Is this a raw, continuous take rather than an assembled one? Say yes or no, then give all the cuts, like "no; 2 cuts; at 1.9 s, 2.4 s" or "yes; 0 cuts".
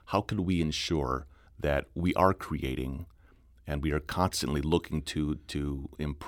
no; 1 cut; at 1.4 s